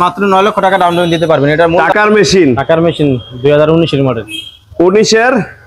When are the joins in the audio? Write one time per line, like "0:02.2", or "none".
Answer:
0:01.8